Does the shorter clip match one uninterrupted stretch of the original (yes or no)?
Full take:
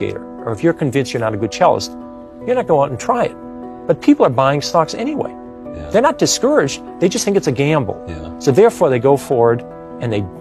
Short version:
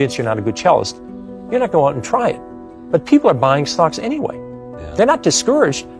yes